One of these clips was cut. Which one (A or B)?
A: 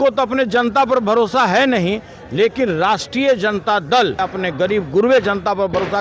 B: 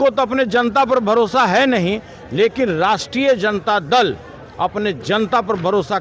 A